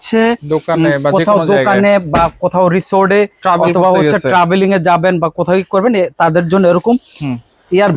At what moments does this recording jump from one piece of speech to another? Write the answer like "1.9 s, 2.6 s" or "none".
none